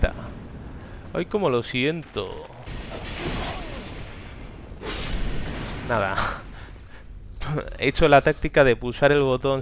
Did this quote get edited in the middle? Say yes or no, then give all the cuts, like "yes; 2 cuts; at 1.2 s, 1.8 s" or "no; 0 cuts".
yes; 1 cut; at 2.7 s